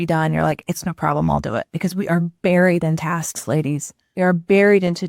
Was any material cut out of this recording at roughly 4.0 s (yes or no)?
yes